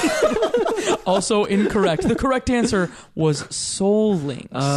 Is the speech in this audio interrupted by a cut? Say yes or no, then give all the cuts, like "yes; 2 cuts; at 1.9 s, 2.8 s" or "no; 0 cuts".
no; 0 cuts